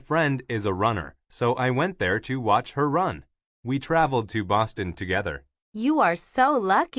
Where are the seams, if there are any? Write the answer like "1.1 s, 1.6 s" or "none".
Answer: 2.3 s